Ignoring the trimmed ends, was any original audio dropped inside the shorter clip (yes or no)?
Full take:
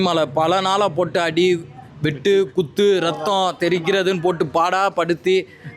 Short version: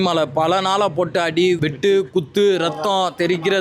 yes